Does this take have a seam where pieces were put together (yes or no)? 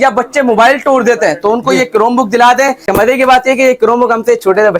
yes